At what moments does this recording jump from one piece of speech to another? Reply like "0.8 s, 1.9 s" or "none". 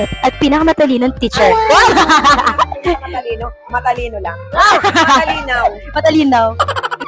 none